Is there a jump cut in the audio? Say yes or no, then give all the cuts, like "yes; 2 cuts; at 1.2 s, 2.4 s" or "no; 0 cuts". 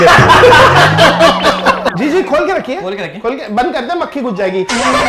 yes; 1 cut; at 1.9 s